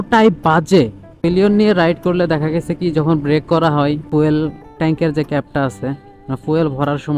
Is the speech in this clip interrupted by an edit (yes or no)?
yes